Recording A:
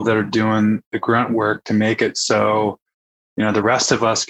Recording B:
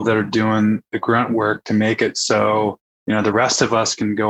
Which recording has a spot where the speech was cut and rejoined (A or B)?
B